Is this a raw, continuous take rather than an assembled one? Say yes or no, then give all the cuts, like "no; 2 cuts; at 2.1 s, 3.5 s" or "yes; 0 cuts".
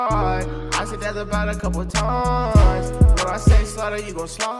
yes; 0 cuts